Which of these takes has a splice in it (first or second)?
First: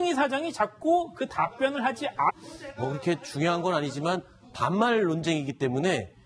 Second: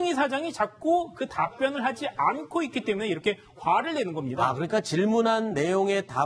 second